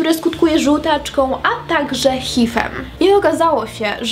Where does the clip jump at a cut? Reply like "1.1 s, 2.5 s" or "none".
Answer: 2.7 s